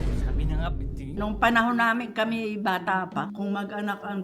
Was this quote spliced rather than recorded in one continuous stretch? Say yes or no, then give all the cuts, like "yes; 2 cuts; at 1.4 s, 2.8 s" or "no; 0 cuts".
yes; 1 cut; at 1.2 s